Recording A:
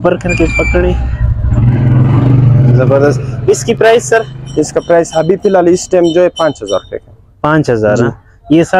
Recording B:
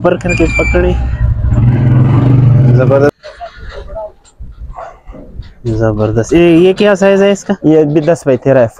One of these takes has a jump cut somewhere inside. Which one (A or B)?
B